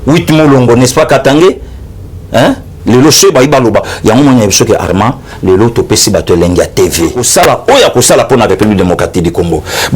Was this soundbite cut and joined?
yes; 1 cut; at 7.2 s

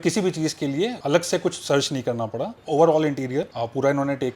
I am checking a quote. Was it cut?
yes; 1 cut; at 1.0 s

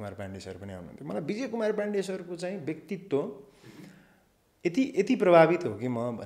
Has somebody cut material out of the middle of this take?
no; 0 cuts

